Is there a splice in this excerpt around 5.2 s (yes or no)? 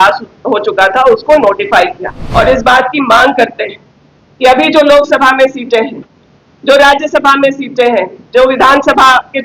no